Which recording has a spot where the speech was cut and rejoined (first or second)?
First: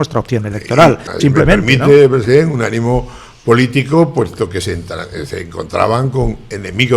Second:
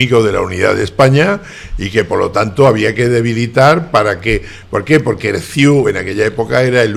first